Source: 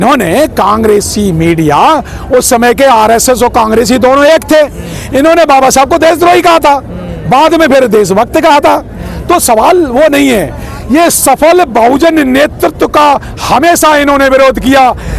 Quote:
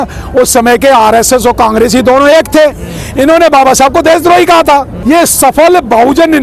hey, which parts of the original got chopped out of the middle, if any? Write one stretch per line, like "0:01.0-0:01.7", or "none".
0:06.9-0:10.8